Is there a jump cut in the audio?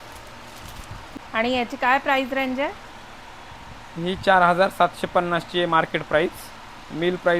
yes; 1 cut; at 1.2 s

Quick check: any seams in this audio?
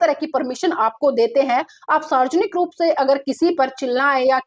no; 0 cuts

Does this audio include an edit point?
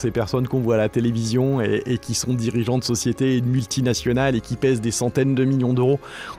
no; 0 cuts

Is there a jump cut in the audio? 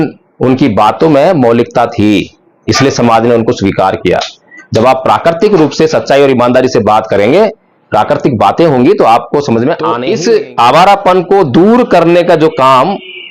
yes; 1 cut; at 9.9 s

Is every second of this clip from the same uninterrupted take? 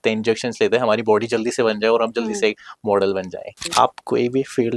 no; 1 cut; at 3.7 s

